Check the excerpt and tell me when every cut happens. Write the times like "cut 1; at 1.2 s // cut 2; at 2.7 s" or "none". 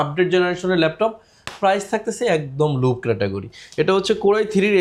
none